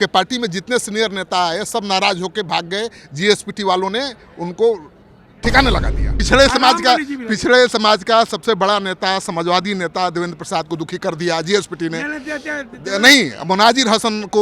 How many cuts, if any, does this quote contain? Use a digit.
1